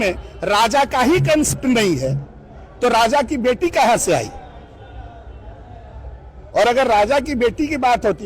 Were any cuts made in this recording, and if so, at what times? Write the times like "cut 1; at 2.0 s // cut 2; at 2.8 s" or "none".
cut 1; at 1.5 s